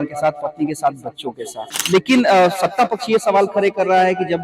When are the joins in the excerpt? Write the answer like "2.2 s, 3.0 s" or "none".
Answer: 1.7 s